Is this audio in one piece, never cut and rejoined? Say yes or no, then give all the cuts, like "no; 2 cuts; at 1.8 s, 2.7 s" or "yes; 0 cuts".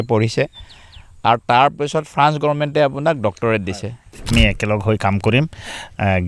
no; 1 cut; at 4.3 s